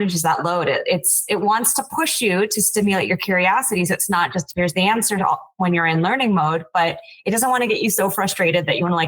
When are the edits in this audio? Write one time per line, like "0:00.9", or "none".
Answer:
none